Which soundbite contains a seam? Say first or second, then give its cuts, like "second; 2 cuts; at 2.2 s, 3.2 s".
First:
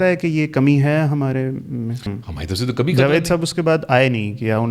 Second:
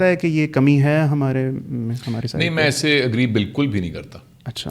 first; 1 cut; at 2.1 s